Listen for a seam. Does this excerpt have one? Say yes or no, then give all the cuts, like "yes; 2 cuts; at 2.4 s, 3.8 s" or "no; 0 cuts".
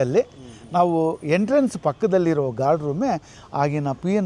no; 0 cuts